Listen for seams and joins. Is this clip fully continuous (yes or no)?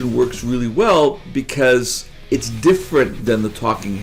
no